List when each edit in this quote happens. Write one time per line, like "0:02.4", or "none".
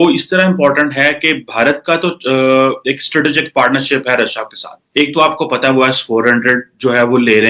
0:04.8